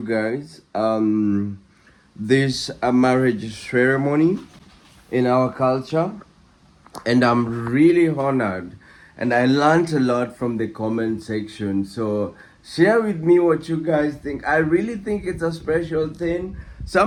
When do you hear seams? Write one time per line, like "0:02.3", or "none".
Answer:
none